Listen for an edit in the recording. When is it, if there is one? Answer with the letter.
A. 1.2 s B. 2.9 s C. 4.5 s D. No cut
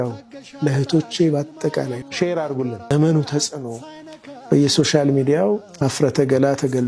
B